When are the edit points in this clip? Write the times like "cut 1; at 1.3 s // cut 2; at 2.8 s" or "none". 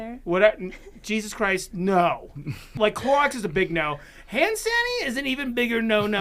cut 1; at 2.7 s